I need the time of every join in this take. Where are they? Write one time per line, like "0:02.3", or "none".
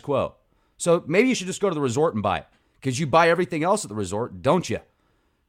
0:03.9